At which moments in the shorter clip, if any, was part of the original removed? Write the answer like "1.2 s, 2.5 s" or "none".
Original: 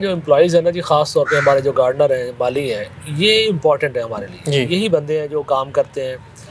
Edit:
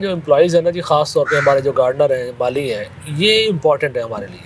none